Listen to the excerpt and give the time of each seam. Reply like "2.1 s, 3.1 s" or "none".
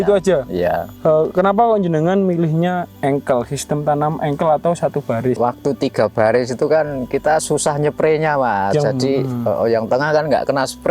0.9 s, 5.4 s